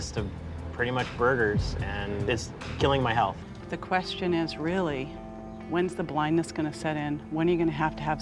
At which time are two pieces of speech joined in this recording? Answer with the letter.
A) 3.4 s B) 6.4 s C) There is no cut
C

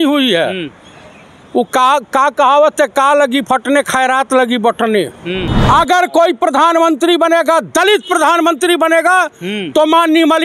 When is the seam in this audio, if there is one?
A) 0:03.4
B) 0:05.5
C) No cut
B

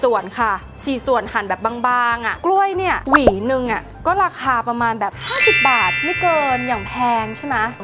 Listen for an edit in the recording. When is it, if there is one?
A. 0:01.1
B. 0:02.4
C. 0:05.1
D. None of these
B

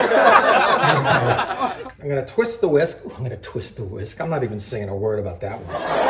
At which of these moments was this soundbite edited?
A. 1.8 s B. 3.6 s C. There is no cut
A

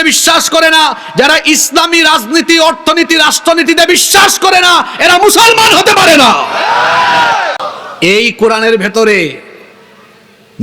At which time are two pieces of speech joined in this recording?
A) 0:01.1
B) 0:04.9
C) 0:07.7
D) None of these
C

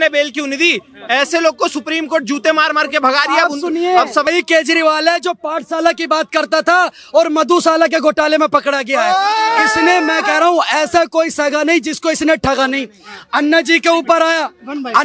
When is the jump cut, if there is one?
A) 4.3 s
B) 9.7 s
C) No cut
A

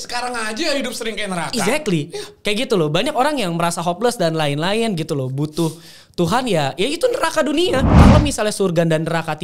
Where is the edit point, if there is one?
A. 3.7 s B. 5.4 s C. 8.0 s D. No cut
C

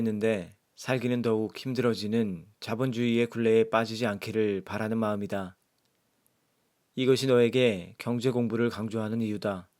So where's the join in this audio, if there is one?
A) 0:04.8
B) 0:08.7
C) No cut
C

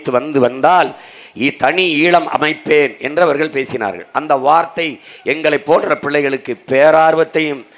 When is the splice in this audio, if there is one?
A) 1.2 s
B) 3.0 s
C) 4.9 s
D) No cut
D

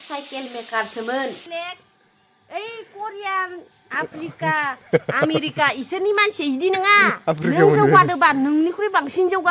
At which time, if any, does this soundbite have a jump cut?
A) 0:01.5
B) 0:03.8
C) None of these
A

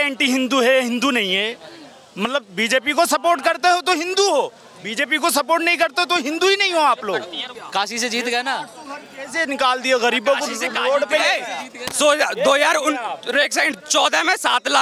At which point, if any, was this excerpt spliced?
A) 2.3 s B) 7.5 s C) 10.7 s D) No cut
B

